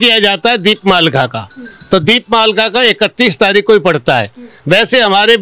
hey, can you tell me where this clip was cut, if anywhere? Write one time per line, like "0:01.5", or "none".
none